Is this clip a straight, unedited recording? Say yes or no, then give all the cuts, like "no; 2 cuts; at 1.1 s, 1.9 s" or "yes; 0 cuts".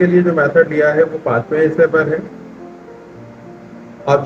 yes; 0 cuts